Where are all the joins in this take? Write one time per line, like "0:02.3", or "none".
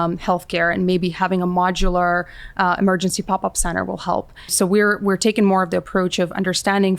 0:04.5